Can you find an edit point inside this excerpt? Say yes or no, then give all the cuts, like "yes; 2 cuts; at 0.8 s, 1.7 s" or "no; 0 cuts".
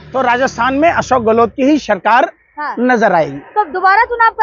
no; 0 cuts